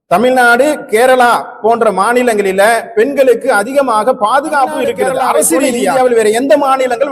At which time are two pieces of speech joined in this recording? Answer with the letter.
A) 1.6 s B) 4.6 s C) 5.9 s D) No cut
C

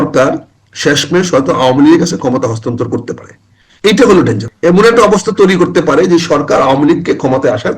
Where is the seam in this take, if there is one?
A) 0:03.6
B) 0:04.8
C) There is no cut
B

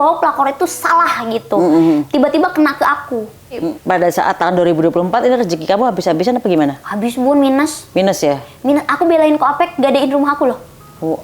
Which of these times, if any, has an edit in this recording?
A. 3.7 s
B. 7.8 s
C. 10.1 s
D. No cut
A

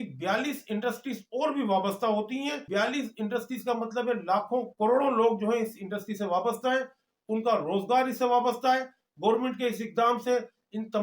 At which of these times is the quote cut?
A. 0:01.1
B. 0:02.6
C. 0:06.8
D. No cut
B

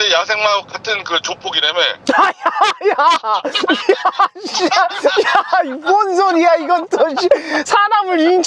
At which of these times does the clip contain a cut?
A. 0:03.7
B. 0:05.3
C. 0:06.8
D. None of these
D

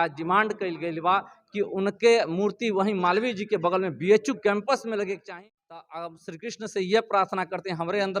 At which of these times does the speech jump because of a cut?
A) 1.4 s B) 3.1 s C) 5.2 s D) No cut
C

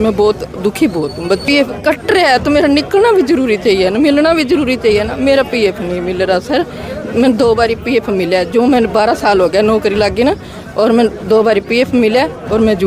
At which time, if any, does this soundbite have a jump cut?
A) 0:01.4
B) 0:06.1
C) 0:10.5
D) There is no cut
A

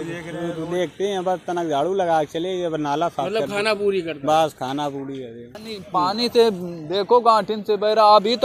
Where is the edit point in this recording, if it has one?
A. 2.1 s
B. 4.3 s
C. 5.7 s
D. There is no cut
C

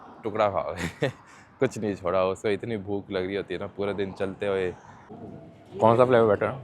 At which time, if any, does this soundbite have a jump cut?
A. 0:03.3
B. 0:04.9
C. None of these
B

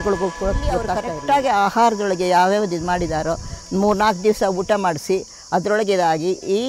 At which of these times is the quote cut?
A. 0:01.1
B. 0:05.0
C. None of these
A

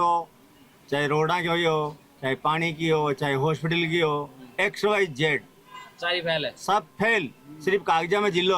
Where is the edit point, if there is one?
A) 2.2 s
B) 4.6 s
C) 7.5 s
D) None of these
D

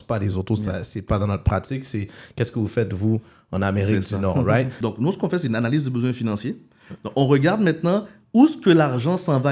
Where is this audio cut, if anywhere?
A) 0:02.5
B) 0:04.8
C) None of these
B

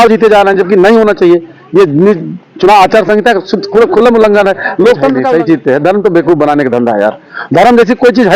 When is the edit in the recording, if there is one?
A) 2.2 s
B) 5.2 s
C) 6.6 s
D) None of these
B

